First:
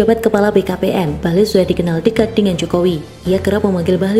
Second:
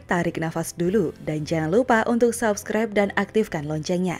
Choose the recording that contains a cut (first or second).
first